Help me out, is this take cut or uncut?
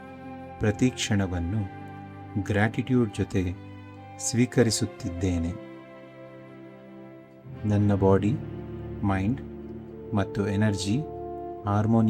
uncut